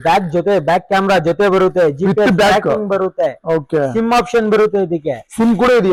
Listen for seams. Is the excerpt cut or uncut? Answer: uncut